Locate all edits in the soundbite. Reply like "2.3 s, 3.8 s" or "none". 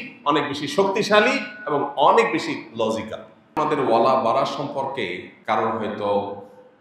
3.5 s, 5.3 s

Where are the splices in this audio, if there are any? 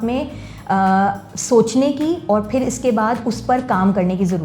none

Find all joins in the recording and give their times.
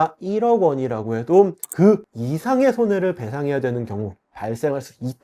none

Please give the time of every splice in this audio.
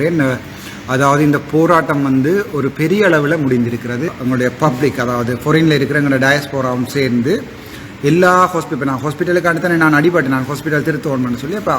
4.1 s

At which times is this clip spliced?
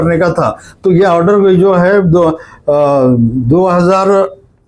none

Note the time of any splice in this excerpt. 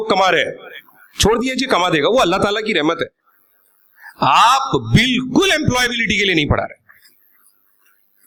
none

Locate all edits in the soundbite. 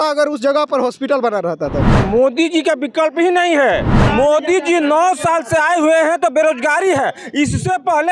2.0 s, 4.0 s

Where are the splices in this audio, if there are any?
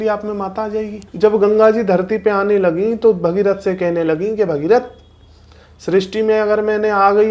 1.0 s

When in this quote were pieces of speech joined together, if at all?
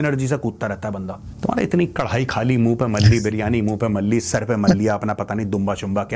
none

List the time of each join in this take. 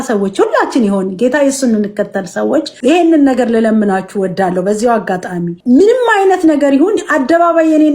2.7 s, 5.5 s

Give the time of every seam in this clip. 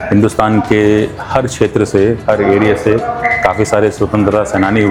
none

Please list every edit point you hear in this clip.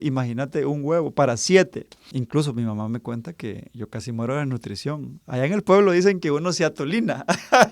2.0 s

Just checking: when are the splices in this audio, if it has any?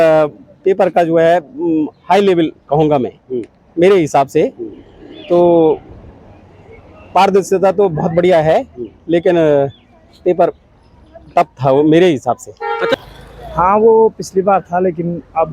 12.9 s

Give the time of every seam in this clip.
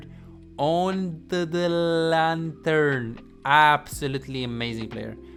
none

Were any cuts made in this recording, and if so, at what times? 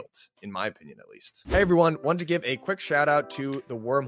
1.5 s

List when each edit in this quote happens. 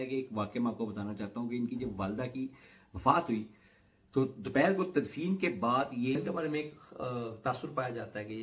6.2 s

